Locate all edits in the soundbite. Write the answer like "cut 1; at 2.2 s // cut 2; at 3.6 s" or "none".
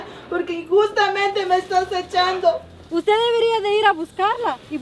cut 1; at 2.8 s